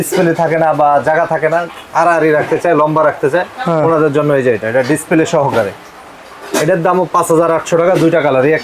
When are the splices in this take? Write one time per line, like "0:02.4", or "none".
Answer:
none